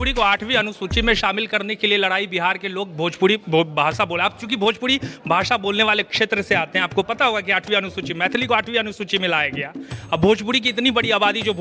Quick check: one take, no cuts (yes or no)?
yes